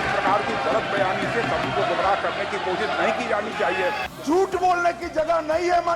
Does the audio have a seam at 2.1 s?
no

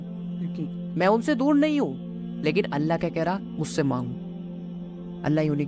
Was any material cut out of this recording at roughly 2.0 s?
yes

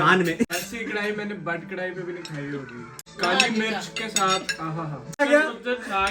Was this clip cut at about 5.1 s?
yes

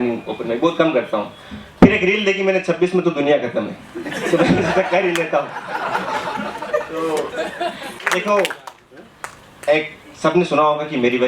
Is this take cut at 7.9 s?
yes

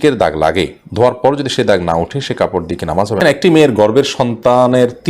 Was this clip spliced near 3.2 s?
yes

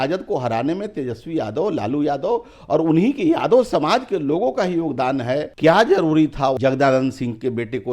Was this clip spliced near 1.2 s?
no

